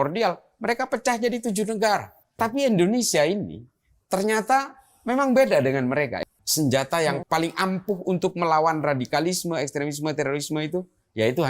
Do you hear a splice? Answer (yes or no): yes